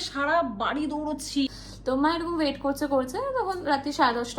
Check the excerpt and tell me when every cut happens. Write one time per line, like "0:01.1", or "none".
0:01.5